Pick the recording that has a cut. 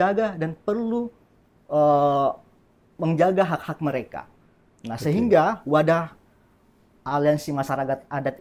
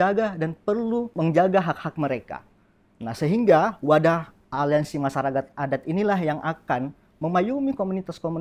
second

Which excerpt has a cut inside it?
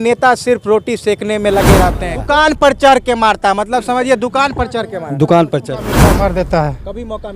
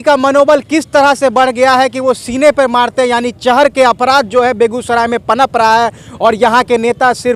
first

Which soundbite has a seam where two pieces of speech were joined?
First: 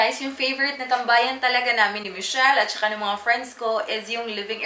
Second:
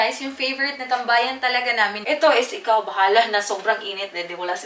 second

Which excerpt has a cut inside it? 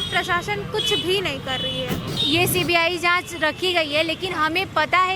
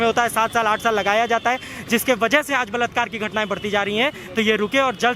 first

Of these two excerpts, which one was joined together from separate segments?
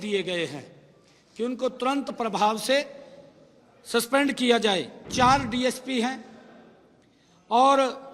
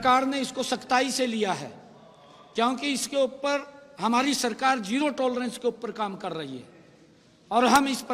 first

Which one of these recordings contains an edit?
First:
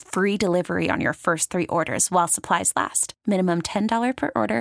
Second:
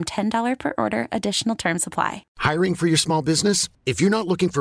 second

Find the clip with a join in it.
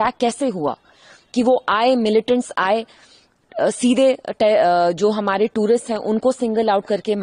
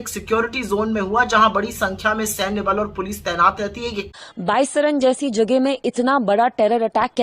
second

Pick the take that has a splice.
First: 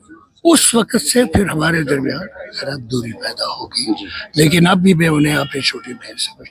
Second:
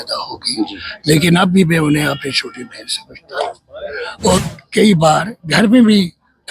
second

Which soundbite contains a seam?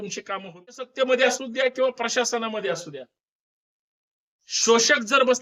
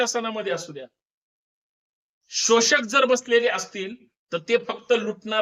first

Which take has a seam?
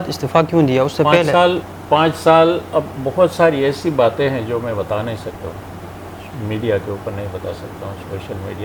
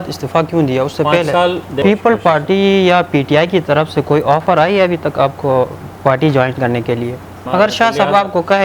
second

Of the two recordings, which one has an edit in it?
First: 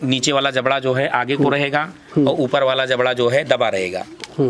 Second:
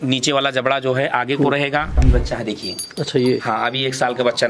second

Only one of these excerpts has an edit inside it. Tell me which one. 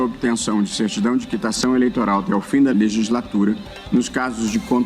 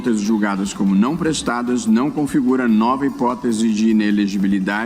first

